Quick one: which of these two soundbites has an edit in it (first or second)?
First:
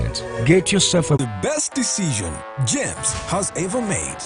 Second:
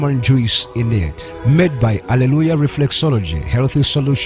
first